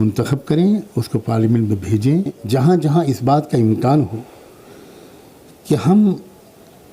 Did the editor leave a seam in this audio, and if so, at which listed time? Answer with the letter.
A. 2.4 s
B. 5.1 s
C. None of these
A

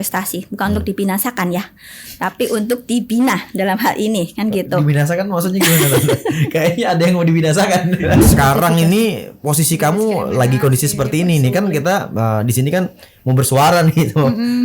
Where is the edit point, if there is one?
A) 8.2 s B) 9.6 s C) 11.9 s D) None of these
A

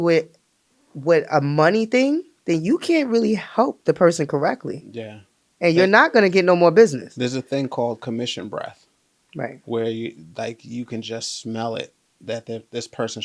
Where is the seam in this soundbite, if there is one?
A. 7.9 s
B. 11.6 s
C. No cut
C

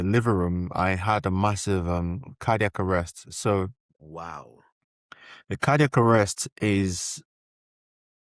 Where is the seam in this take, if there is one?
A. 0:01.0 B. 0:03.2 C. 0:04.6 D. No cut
D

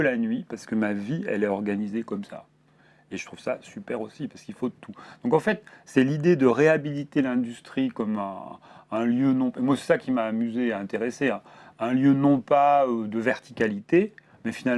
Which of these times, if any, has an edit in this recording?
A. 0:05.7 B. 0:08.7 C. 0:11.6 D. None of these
D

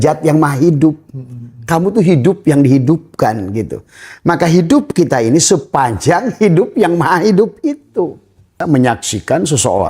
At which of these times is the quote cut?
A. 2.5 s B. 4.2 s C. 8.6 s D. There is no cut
C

